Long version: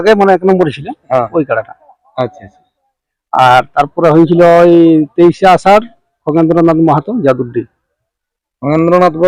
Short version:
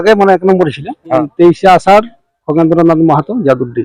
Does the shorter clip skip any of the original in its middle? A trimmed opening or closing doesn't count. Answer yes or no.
yes